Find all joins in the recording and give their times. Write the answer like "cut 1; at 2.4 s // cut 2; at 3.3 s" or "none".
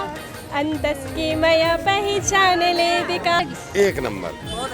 cut 1; at 3.4 s